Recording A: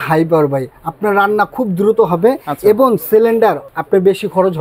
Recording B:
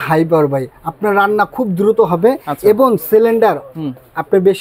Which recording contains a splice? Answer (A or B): A